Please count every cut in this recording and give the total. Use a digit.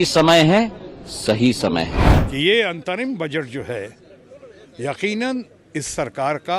1